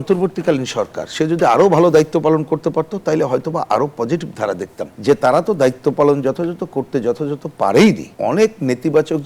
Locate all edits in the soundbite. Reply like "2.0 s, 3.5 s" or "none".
4.9 s, 8.1 s